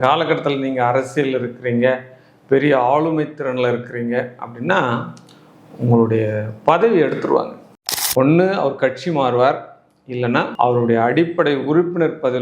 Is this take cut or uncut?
cut